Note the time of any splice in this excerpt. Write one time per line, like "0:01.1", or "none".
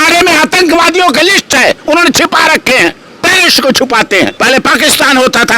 0:04.4